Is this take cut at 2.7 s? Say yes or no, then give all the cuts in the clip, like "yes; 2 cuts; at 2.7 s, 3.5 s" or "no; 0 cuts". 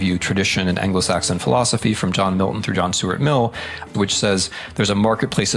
no; 1 cut; at 3.9 s